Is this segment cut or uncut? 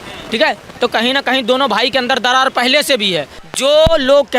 cut